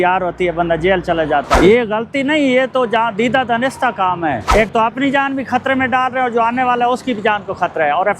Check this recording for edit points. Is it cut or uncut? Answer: cut